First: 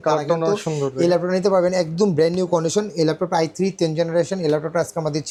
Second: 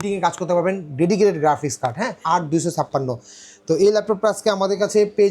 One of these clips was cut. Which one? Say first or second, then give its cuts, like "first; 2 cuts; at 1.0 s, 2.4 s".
second; 1 cut; at 2.2 s